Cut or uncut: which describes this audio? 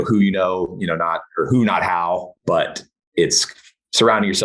cut